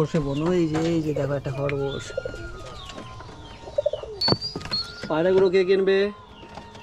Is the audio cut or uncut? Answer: cut